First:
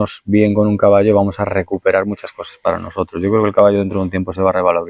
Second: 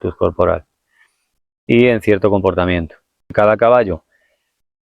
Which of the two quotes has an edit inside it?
second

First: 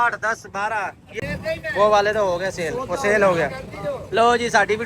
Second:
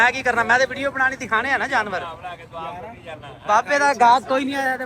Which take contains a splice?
first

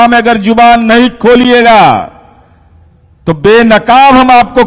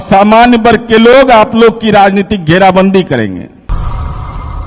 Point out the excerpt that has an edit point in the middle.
second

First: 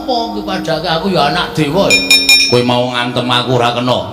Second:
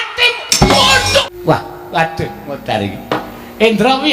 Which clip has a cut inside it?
second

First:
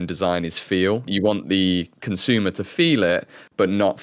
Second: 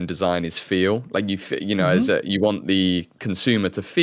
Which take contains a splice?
first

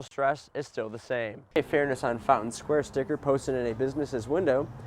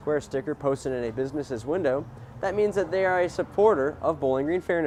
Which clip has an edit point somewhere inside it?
first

